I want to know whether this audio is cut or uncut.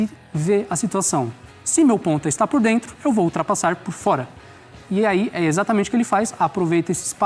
uncut